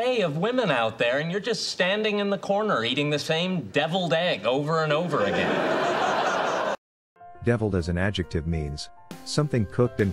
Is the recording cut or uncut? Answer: uncut